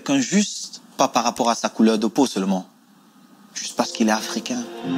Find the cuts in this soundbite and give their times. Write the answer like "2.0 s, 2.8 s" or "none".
none